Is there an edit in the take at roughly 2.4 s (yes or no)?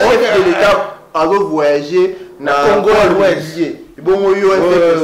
no